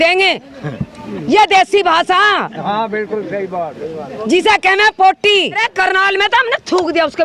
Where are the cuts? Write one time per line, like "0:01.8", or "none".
0:05.6

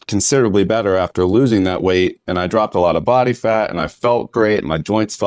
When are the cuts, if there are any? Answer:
none

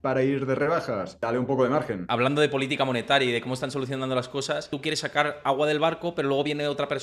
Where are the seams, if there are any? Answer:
0:01.2
0:02.1
0:04.7

